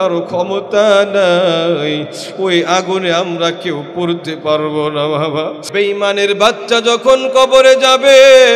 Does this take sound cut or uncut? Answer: cut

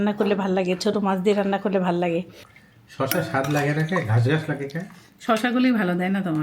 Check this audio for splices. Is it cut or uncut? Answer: uncut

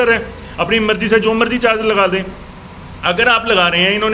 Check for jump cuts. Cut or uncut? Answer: uncut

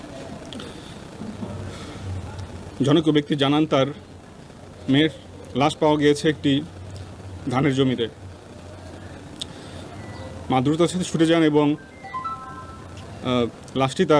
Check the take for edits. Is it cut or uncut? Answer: uncut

